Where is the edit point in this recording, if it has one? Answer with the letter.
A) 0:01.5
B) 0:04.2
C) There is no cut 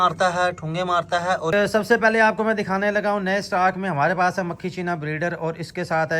A